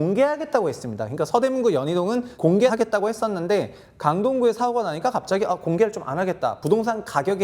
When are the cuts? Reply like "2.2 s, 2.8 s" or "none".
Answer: 2.5 s